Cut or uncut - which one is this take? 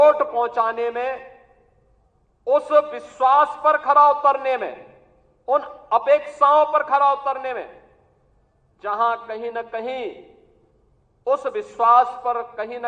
uncut